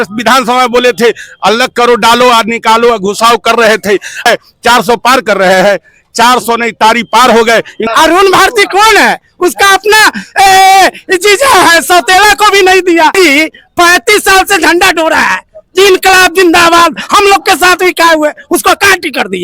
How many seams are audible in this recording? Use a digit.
3